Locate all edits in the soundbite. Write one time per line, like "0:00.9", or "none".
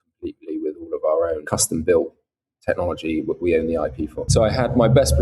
0:01.4
0:04.3